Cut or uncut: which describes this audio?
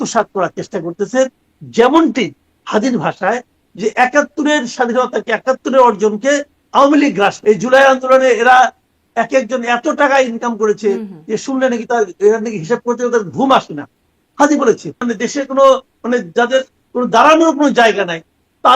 cut